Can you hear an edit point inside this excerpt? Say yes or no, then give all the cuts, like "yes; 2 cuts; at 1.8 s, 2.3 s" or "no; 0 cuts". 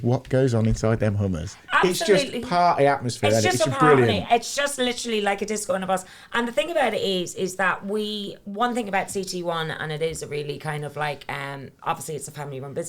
no; 0 cuts